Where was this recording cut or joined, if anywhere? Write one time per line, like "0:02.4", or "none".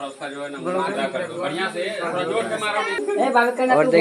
0:03.0